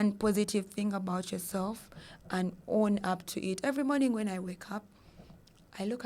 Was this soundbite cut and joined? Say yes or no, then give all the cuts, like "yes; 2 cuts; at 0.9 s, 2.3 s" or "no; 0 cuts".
no; 0 cuts